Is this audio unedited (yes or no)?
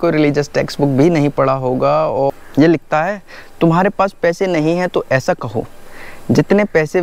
no